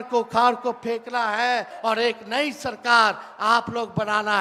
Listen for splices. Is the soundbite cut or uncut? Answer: cut